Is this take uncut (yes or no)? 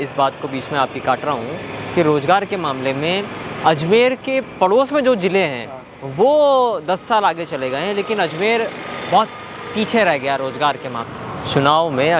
no